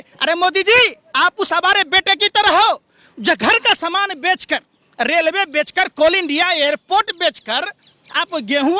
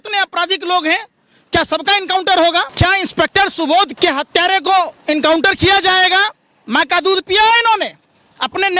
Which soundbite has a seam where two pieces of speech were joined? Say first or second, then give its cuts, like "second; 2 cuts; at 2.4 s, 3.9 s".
second; 2 cuts; at 2.7 s, 3.9 s